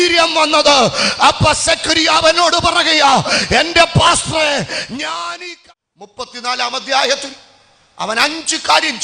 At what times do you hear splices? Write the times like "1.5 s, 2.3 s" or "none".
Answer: 5.3 s